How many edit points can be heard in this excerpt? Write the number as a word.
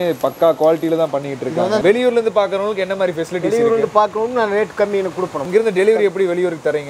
two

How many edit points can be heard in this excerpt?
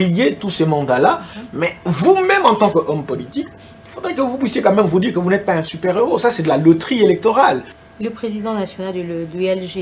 one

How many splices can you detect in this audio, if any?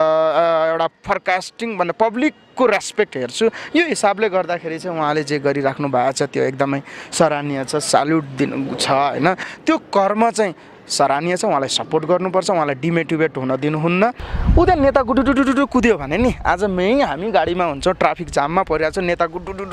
two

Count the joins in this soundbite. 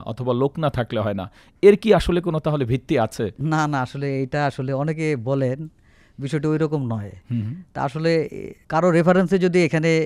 zero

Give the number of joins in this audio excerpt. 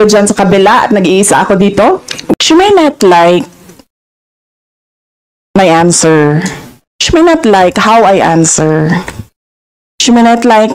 one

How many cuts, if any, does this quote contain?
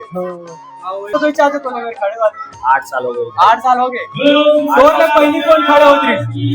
one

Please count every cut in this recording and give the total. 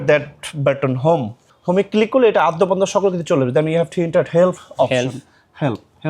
one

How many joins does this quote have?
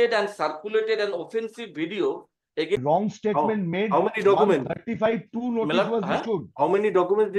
one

